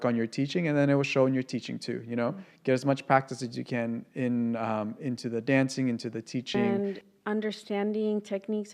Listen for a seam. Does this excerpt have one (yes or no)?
yes